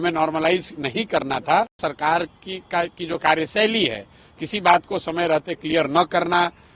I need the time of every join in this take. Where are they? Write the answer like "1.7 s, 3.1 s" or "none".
1.8 s